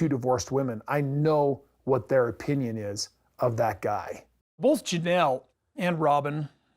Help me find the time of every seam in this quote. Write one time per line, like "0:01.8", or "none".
0:04.4